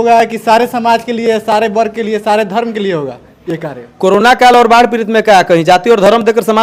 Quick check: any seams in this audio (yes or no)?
no